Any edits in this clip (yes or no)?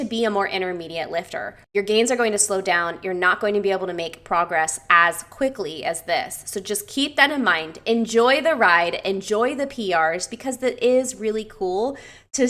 yes